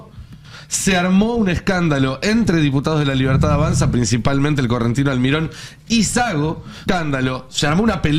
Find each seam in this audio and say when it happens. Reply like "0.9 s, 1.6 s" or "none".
6.7 s